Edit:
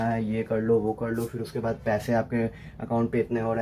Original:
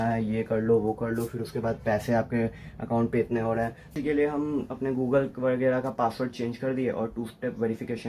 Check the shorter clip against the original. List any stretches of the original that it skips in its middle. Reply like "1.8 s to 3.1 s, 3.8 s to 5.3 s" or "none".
none